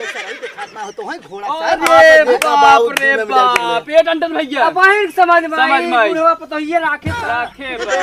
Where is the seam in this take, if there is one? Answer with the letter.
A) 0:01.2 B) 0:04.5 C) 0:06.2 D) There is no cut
D